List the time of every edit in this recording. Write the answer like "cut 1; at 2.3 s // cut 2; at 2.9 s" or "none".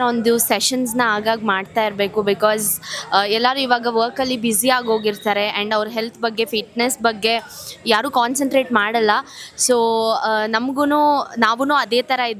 none